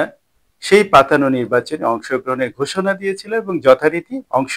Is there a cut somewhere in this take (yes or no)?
no